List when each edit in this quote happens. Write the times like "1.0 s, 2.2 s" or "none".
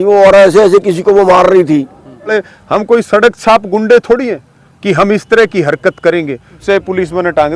2.3 s, 6.6 s